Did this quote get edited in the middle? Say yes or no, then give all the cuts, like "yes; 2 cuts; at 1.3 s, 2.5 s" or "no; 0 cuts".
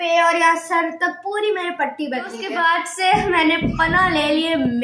yes; 1 cut; at 2.4 s